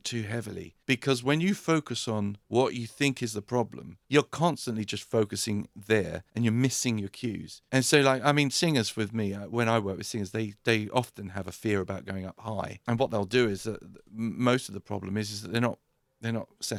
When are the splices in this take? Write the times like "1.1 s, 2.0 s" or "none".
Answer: none